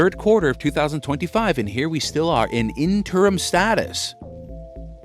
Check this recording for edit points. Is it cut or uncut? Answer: cut